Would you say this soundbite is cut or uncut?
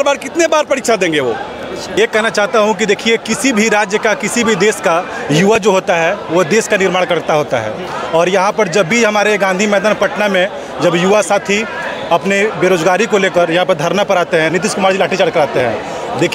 cut